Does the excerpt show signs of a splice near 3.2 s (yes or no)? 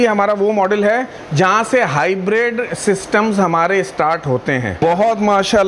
no